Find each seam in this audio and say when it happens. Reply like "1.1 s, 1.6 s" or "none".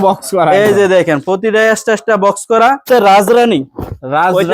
2.8 s